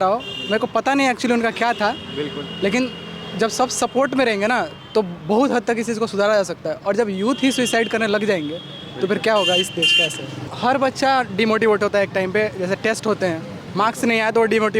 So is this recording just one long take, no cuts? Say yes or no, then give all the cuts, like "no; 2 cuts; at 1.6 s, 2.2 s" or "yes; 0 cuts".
no; 1 cut; at 10.5 s